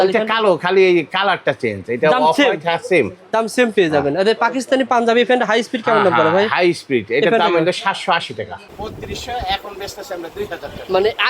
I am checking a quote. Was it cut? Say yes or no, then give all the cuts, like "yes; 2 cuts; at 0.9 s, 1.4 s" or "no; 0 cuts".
yes; 1 cut; at 8.7 s